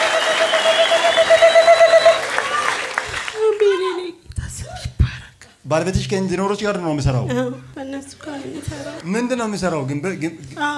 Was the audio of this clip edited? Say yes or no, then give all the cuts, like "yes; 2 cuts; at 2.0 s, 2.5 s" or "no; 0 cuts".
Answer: yes; 3 cuts; at 5.6 s, 7.7 s, 9.0 s